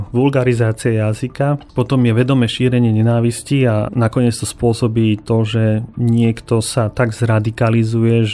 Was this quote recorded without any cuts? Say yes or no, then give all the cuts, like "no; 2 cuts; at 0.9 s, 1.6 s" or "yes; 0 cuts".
yes; 0 cuts